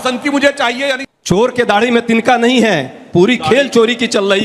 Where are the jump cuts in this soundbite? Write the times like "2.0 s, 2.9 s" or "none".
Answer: 1.0 s